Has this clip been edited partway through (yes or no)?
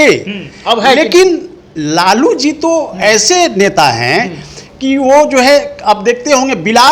no